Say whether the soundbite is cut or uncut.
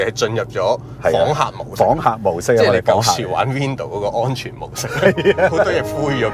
uncut